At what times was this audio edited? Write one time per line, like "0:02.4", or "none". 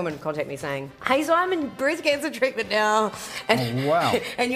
0:00.9